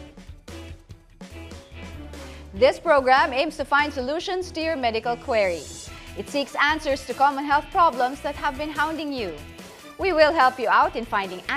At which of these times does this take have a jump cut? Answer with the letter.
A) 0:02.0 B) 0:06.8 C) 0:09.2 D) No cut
D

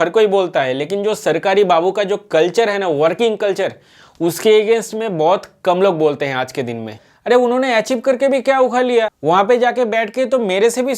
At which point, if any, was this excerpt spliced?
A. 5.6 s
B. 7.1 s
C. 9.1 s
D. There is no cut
B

